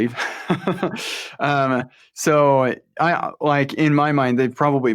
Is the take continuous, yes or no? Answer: yes